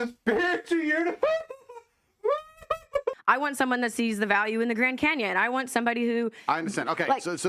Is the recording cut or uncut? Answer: cut